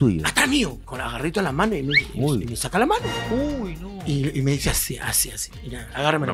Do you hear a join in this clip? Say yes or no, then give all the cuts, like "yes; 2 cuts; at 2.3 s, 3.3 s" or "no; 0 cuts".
yes; 1 cut; at 0.9 s